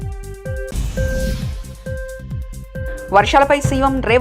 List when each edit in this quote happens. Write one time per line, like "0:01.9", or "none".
0:02.9